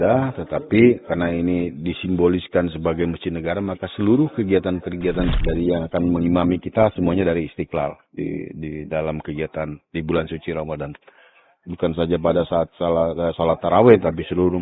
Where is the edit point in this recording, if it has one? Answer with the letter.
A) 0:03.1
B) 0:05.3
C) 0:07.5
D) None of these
B